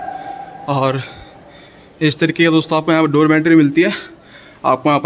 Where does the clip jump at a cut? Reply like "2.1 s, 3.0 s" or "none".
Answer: none